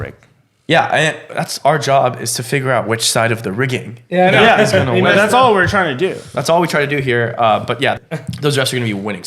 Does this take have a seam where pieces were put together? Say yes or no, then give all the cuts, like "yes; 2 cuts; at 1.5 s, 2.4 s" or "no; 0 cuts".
yes; 1 cut; at 8.0 s